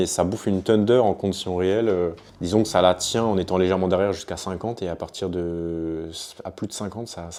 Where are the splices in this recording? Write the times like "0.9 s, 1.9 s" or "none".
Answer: none